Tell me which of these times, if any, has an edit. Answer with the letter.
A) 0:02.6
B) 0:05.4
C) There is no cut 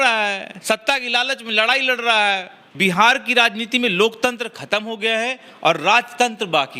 A